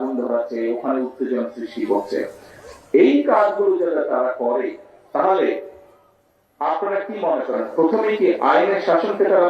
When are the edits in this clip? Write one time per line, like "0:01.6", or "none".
none